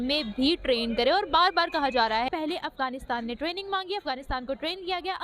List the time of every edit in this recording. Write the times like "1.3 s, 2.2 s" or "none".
2.3 s